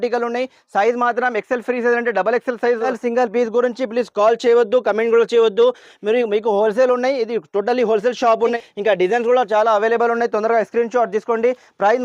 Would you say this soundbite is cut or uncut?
cut